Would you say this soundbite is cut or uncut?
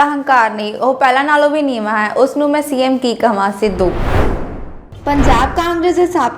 uncut